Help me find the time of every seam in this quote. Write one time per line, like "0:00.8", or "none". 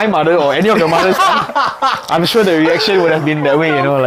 none

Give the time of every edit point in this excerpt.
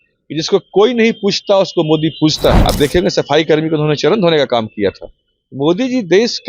0:02.6

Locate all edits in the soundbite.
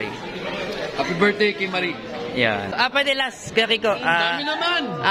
0:02.8

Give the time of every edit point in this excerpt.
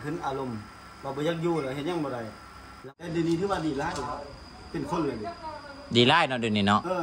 0:02.8

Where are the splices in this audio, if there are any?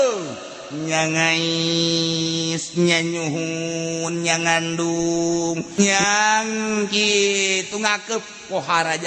0:05.8

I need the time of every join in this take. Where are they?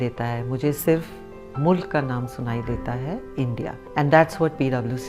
0:03.8

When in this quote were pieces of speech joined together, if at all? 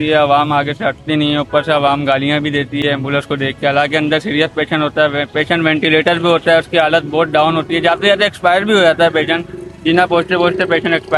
none

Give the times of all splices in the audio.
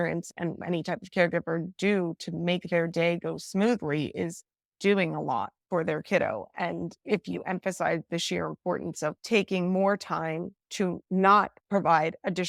none

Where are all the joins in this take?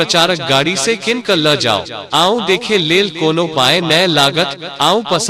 0:01.9

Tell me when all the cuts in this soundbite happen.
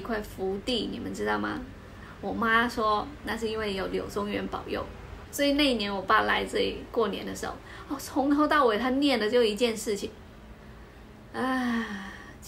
0:05.0

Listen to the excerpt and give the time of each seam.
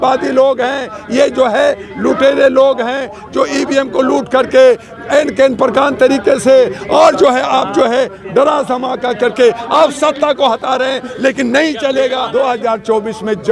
0:12.3

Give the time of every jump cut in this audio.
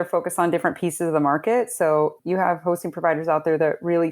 0:02.2

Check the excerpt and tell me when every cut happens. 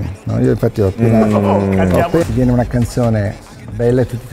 0:02.2

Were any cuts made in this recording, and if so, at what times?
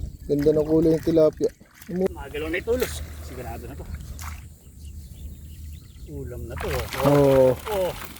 0:02.1

